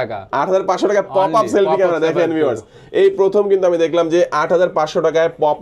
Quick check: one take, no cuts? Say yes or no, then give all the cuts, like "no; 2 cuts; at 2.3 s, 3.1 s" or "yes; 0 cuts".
yes; 0 cuts